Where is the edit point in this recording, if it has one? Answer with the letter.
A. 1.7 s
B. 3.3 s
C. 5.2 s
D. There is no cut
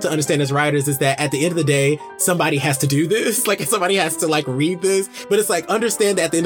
C